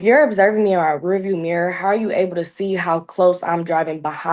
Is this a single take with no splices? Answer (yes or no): yes